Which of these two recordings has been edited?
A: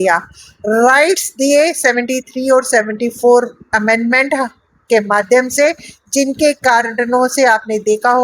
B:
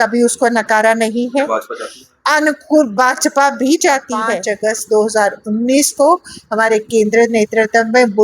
B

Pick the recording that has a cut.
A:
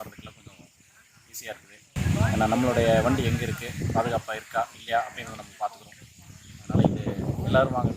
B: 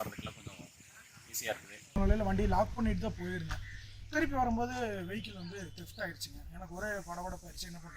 B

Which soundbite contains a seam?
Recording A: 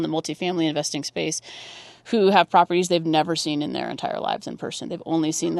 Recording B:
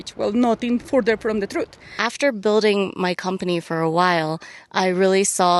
B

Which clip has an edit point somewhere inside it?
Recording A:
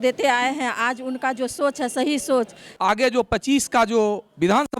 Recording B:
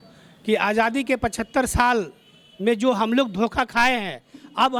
A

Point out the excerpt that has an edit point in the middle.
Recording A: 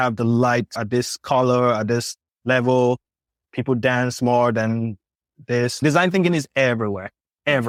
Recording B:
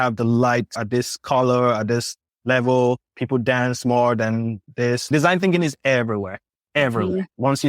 B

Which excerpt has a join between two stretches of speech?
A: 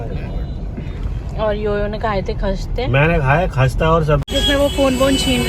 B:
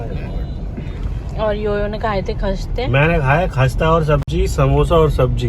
A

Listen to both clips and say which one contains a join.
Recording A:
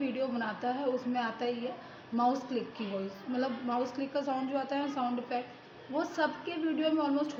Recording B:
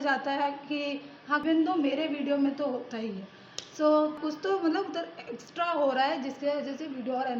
B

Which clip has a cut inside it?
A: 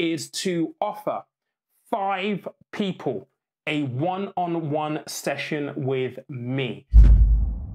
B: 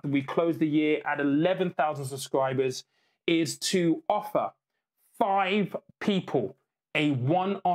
A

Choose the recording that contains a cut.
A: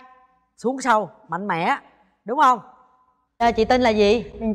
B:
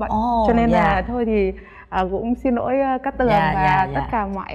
A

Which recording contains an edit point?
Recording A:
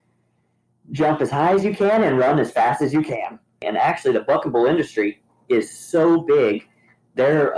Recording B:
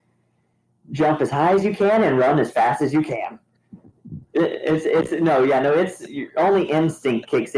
A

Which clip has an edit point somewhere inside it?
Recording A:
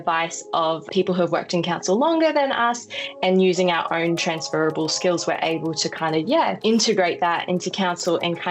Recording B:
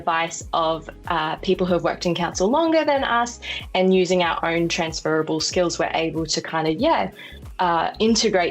A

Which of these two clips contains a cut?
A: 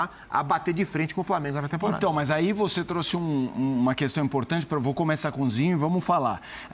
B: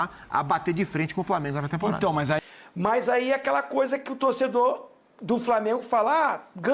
B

